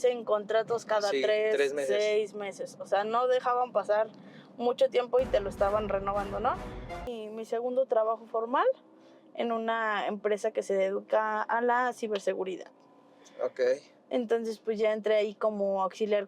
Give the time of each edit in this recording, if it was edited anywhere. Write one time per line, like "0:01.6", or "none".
0:07.1

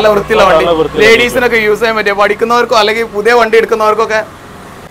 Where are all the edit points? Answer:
none

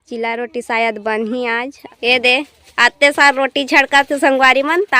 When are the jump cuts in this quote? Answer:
0:01.8

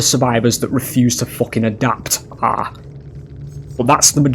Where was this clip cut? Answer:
none

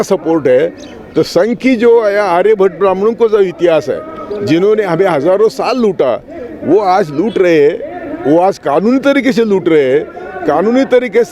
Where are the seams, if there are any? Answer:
none

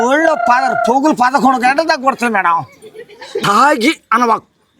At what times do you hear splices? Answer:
0:03.4

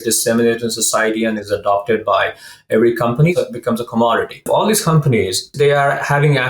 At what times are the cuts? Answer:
0:03.3
0:04.5
0:05.5

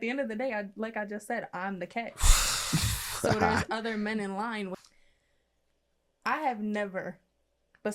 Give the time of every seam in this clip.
0:04.7

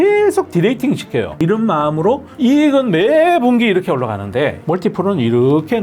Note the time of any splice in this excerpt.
0:01.4

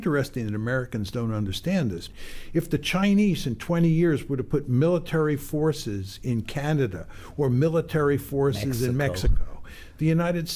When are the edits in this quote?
0:02.1

